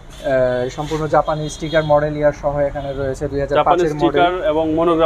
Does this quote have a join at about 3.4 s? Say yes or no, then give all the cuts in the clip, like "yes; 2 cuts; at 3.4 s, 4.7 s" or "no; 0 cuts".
no; 0 cuts